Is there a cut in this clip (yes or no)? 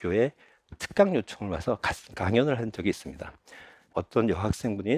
yes